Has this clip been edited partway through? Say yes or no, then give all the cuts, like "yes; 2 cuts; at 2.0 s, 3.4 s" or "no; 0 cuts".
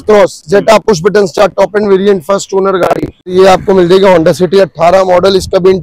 yes; 1 cut; at 3.1 s